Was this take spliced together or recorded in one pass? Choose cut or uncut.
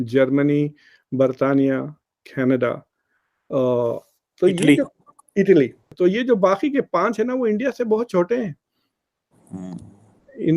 cut